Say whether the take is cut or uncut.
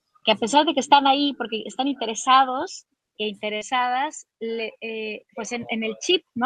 uncut